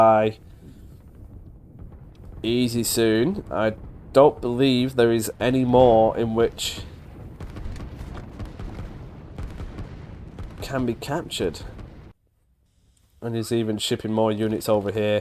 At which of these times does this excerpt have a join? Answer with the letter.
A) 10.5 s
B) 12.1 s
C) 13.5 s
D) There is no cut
B